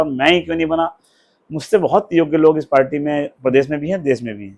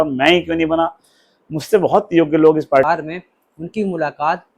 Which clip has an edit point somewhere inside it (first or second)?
second